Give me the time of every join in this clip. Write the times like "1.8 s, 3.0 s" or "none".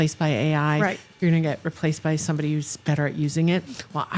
none

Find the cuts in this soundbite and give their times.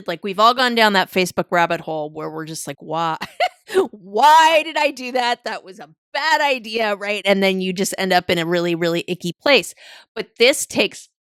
none

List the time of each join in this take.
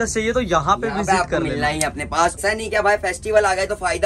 2.4 s

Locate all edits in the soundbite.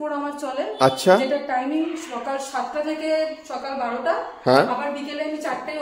none

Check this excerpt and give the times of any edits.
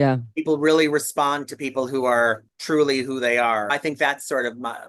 2.5 s, 3.7 s

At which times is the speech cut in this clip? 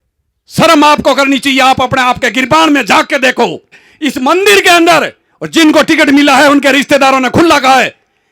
3.9 s

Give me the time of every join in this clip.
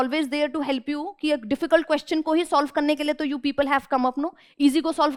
none

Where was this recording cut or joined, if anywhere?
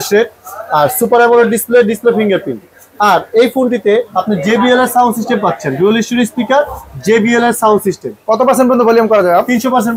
none

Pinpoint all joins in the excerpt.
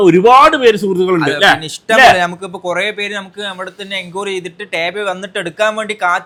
none

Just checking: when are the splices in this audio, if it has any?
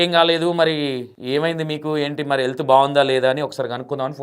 1.1 s

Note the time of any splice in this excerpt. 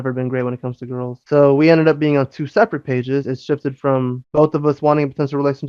none

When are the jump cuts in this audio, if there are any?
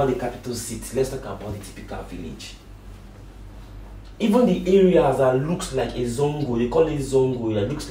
none

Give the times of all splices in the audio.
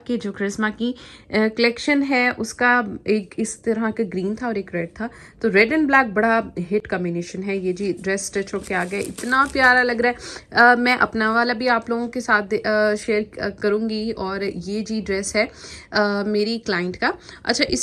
none

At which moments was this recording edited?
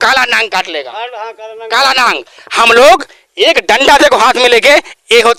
none

